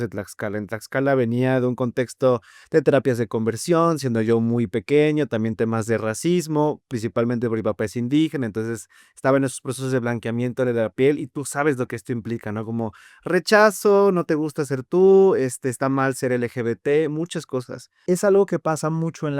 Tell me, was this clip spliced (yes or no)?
yes